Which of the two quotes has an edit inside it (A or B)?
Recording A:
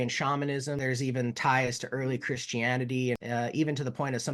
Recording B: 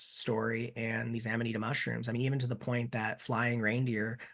A